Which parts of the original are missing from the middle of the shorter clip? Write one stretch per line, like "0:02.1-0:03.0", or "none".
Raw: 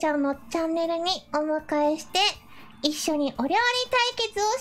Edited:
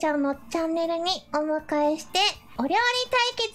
0:02.5-0:03.3